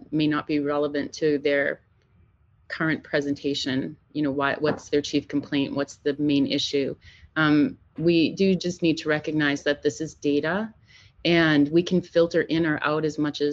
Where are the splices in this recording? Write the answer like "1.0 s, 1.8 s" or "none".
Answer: none